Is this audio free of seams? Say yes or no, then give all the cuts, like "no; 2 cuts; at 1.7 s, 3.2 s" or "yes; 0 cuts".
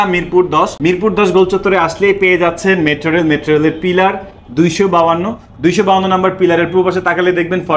yes; 0 cuts